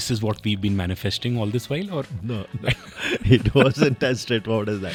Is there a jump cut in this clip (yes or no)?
no